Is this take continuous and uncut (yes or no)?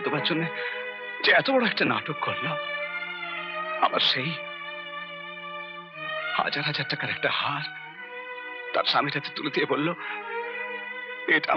yes